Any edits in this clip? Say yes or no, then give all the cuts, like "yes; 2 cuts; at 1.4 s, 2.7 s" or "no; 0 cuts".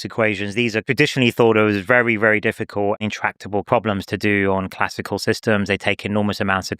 yes; 1 cut; at 3.7 s